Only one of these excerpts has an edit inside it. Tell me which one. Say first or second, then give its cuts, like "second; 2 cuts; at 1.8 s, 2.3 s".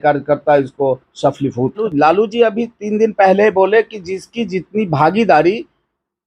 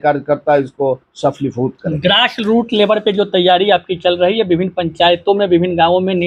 first; 1 cut; at 1.8 s